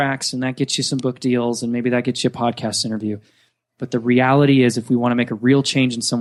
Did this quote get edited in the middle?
no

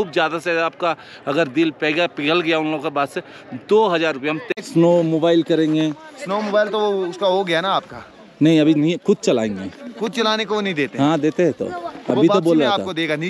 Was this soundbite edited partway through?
yes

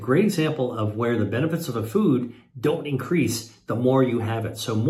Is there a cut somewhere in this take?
no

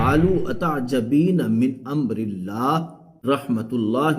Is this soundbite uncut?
no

